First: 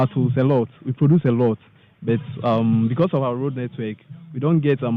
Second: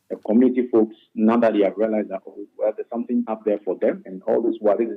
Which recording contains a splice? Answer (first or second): second